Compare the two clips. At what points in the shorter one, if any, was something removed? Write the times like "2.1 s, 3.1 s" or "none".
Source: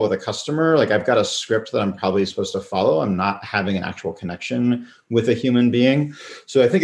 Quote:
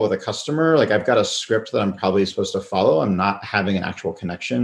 none